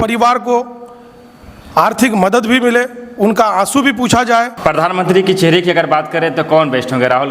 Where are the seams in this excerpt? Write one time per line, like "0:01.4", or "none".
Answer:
0:04.5

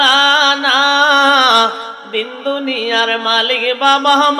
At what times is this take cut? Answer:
none

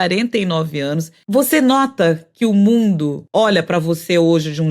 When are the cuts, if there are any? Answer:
0:01.2
0:03.2

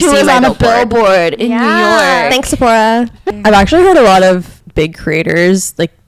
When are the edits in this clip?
0:03.3
0:04.6

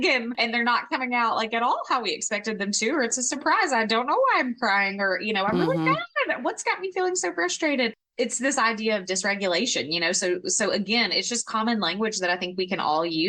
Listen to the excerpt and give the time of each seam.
none

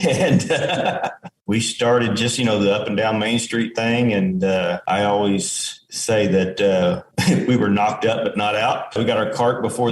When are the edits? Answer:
0:01.3

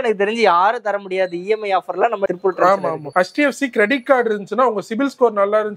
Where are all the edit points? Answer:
none

